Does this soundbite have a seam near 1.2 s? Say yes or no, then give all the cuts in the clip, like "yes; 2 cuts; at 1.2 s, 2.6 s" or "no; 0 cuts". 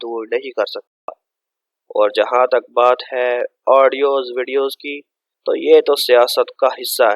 yes; 1 cut; at 1.2 s